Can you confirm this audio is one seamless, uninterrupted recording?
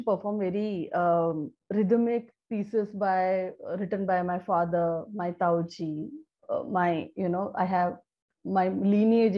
no; 1 cut; at 1.5 s

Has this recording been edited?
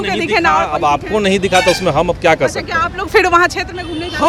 no; 0 cuts

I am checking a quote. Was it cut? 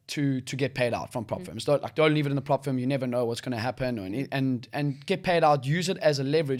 no; 0 cuts

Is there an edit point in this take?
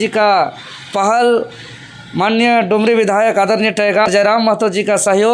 yes; 1 cut; at 4.1 s

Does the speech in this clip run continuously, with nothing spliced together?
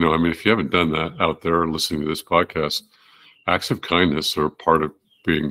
yes; 0 cuts

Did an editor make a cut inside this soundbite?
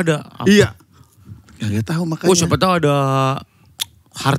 no; 0 cuts

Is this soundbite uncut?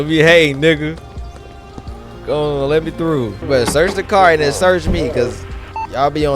no; 1 cut; at 3.4 s

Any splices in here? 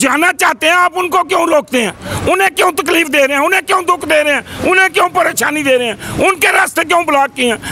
no; 0 cuts

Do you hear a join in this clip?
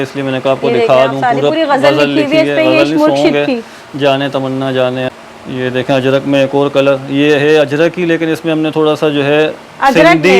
yes; 1 cut; at 5.1 s

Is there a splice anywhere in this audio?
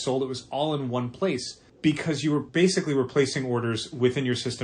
yes; 2 cuts; at 1.6 s, 2.5 s

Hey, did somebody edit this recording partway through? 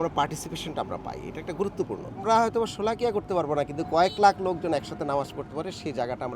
yes; 1 cut; at 2.2 s

